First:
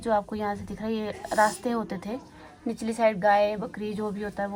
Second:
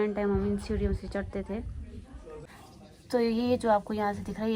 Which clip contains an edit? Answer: second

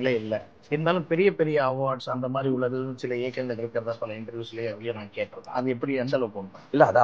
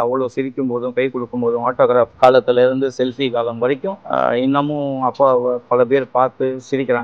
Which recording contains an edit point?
second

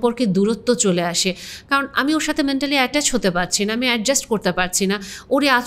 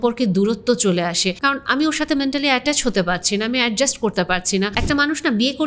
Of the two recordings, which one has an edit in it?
second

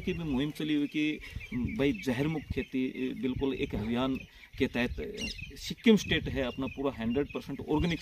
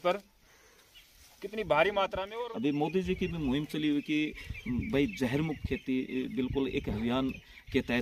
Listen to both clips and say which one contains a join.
second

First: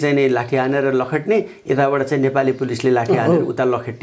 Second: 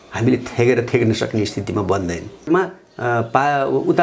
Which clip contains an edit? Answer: second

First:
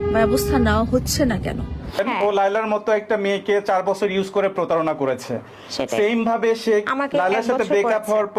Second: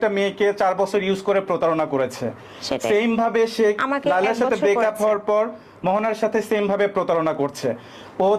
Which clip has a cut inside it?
first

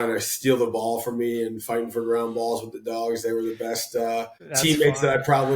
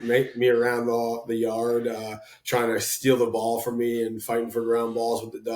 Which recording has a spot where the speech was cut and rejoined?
first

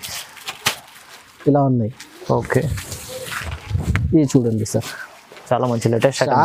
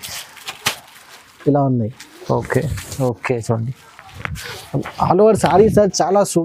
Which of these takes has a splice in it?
second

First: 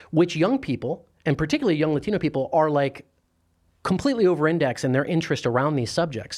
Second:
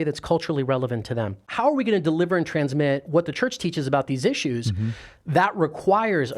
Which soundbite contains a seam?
second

